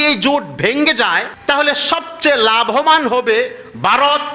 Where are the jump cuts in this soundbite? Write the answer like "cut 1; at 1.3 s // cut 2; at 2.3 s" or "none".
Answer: cut 1; at 1.3 s